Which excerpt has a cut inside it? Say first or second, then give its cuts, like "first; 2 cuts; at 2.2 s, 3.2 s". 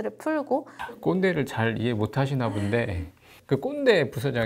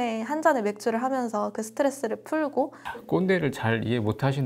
first; 1 cut; at 3.3 s